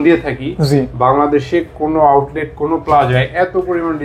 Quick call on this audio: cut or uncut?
uncut